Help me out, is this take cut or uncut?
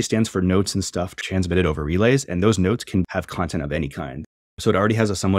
cut